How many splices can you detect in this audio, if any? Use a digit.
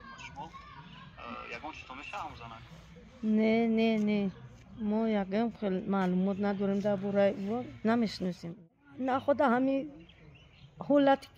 1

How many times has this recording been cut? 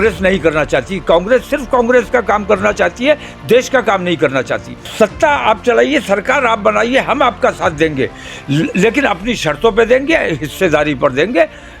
1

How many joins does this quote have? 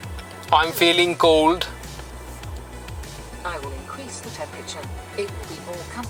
0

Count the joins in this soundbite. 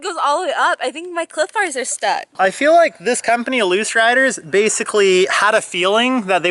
1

